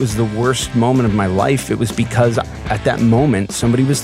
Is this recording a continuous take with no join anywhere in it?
yes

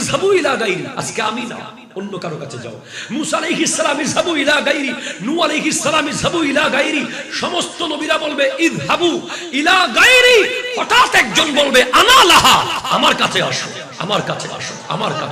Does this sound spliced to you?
no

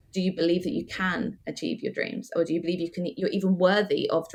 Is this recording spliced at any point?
no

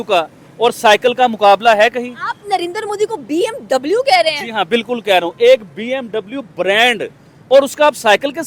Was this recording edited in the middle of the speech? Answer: no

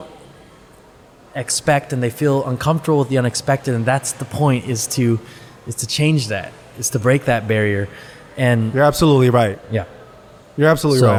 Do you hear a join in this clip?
no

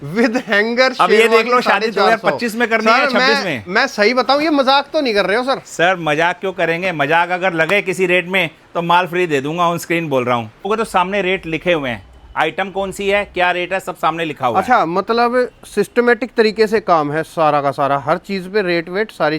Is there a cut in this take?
yes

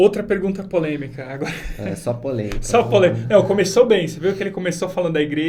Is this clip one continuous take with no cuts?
yes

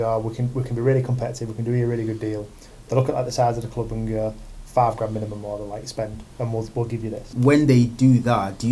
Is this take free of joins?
no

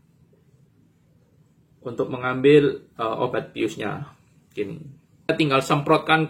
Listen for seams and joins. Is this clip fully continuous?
no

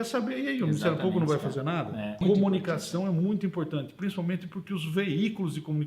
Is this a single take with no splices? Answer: no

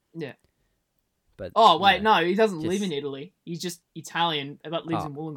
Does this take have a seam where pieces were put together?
no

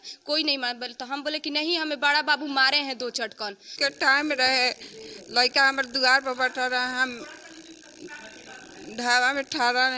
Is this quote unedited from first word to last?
no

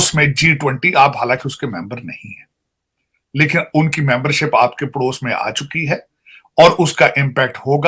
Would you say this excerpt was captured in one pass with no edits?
yes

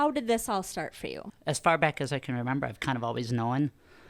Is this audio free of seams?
no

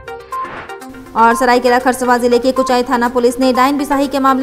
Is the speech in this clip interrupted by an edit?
yes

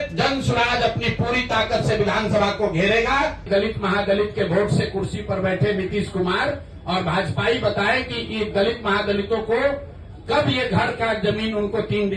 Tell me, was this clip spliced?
yes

